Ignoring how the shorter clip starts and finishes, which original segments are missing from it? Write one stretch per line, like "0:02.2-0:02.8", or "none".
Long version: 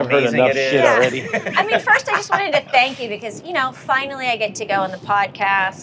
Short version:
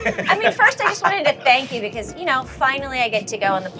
none